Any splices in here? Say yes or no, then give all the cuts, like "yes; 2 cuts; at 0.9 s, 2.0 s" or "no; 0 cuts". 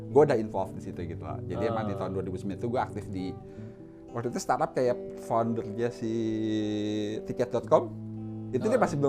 no; 0 cuts